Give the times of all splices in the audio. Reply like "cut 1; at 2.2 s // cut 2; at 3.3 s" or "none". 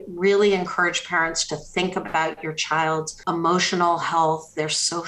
cut 1; at 3.1 s